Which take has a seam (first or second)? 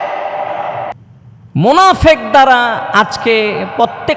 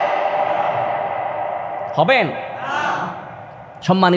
first